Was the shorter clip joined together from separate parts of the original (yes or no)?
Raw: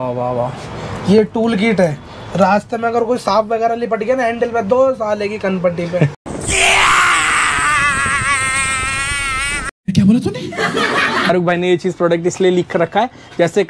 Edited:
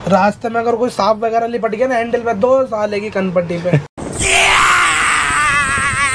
no